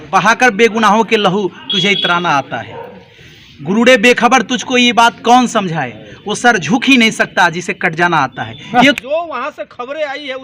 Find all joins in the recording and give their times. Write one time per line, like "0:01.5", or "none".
0:09.0